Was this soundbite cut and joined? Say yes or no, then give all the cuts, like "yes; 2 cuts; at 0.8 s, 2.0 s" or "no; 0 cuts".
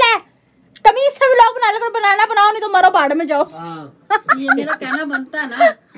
no; 0 cuts